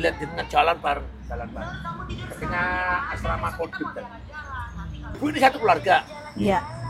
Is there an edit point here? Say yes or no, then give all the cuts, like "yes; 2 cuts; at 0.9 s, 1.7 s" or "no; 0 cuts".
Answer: yes; 1 cut; at 5.2 s